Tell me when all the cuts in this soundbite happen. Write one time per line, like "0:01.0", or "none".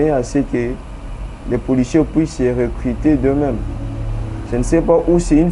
none